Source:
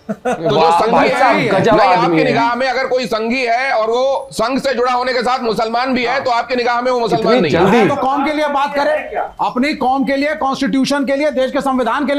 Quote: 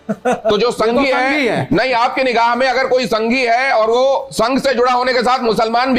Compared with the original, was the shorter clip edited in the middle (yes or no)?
no